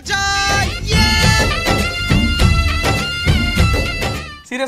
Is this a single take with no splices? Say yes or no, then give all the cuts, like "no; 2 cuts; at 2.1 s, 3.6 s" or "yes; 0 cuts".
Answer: yes; 0 cuts